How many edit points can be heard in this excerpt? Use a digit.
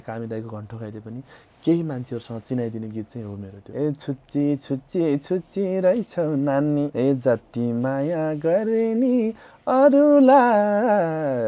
2